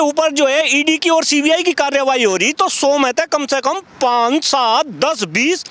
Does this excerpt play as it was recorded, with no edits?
yes; 0 cuts

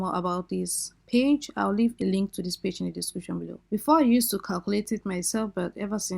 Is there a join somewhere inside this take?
yes; 2 cuts; at 1.9 s, 3.5 s

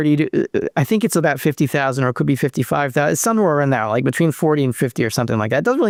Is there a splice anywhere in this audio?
no; 0 cuts

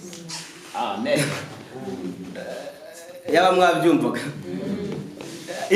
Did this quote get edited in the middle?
no; 0 cuts

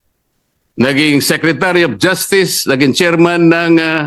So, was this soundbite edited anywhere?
no; 0 cuts

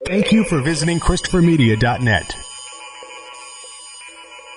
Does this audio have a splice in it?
no; 0 cuts

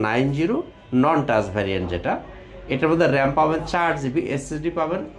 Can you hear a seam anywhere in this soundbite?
no; 0 cuts

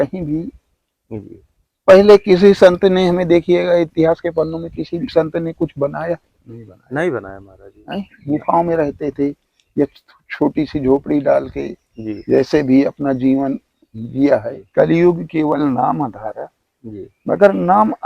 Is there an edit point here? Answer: yes; 1 cut; at 14.6 s

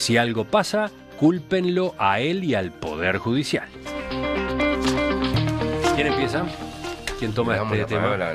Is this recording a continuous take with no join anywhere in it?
yes; 0 cuts

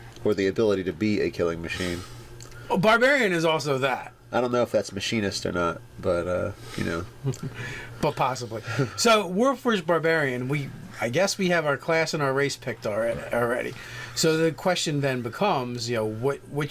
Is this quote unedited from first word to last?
no; 1 cut; at 5.8 s

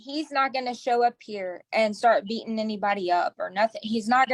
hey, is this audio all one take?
yes; 0 cuts

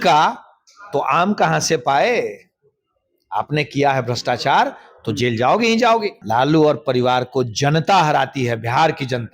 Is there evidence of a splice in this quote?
yes; 1 cut; at 6.2 s

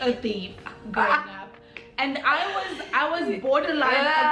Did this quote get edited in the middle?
no; 0 cuts

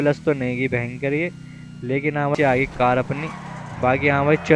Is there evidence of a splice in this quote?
yes; 1 cut; at 2.3 s

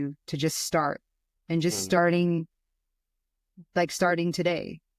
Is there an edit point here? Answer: no; 0 cuts

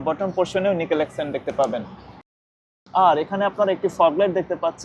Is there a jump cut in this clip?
no; 0 cuts

